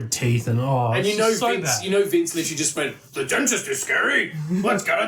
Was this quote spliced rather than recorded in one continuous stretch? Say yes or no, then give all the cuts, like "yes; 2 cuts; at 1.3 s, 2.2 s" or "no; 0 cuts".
no; 0 cuts